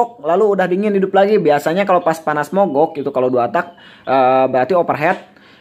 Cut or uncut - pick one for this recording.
uncut